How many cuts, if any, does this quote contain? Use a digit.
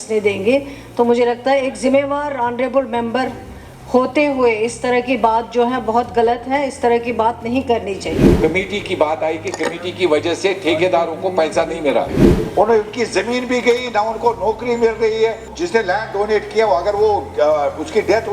3